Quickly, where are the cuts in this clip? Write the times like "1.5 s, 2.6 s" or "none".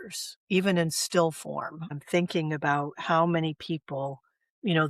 1.9 s